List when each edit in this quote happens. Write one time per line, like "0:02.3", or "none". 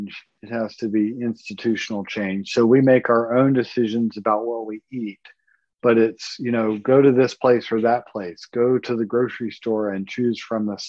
none